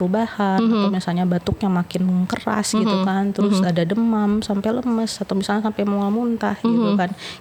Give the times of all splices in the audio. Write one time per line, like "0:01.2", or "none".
none